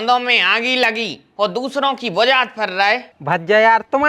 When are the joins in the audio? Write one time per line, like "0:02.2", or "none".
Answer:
0:03.1